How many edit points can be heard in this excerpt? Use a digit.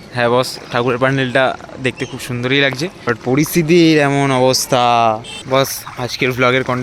2